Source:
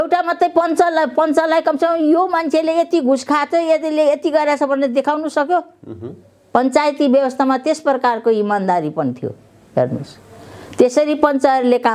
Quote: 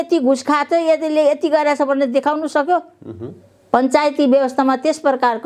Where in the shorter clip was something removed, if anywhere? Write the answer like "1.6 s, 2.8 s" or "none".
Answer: none

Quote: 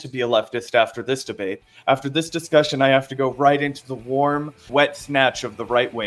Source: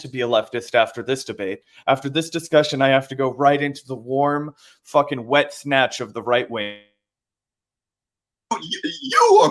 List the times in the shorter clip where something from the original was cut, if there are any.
4.6 s

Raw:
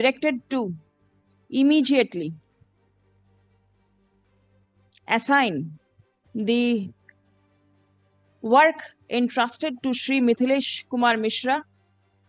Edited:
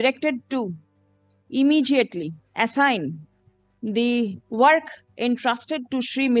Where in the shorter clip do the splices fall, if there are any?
2.4 s, 4.4 s

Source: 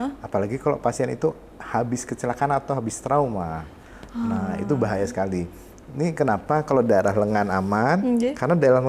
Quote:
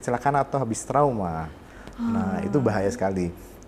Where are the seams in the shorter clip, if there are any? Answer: none

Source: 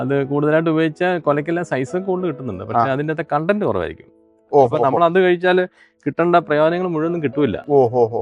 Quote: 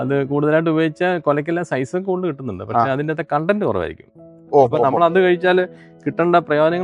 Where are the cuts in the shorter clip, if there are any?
none

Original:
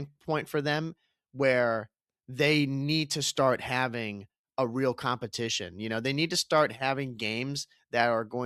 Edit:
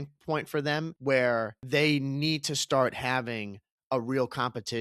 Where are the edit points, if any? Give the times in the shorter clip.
0.9 s, 1.6 s

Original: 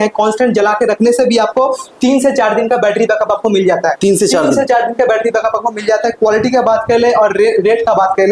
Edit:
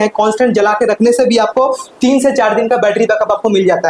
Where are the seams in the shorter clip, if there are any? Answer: none

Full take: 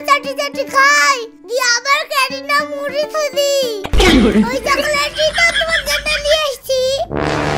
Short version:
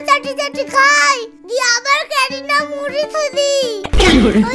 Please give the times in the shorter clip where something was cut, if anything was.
none

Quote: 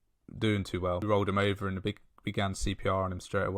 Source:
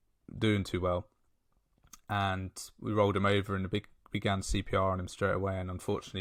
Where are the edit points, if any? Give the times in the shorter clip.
1.0 s

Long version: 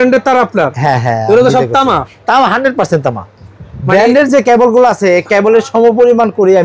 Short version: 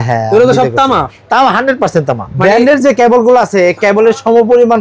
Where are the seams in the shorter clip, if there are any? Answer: 2.3 s

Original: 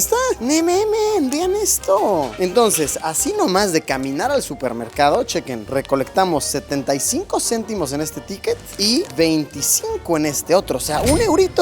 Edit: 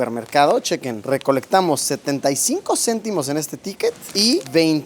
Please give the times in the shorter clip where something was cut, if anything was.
none

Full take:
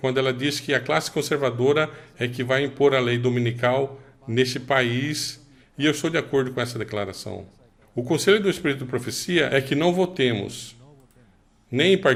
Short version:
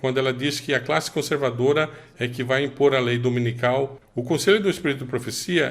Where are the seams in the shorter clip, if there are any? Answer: 4.0 s

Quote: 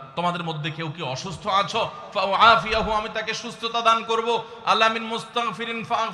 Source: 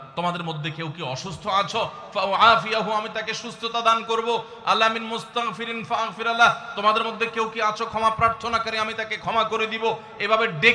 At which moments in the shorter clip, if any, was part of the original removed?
none

